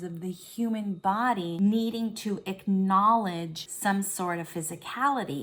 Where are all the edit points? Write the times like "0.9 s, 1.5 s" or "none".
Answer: 1.5 s, 3.6 s